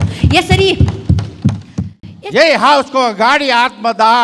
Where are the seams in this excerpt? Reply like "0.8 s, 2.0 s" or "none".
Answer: 2.1 s